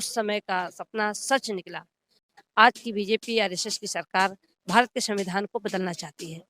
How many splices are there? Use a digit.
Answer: 1